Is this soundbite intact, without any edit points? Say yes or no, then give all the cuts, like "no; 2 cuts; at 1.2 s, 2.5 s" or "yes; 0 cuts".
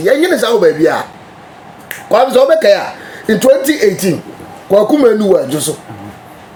yes; 0 cuts